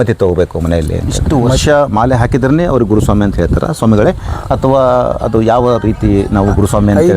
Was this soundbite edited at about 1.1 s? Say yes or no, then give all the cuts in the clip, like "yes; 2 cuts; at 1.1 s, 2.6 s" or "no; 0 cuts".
yes; 1 cut; at 1.1 s